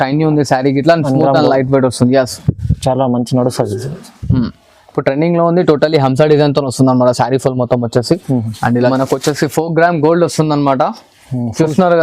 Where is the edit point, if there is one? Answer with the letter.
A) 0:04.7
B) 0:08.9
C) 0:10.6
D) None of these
B